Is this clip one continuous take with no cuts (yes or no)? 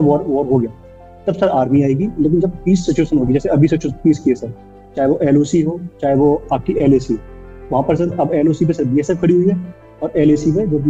yes